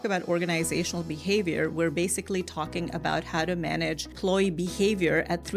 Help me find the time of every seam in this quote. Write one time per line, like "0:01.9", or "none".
0:04.2